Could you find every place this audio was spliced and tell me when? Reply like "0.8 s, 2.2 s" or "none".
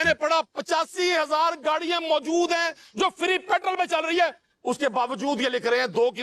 none